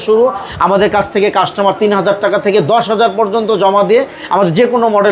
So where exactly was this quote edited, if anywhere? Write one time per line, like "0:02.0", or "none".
none